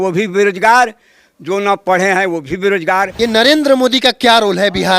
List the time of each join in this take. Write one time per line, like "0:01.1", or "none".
0:03.1